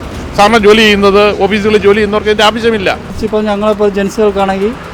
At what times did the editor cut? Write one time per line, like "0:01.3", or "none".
0:03.1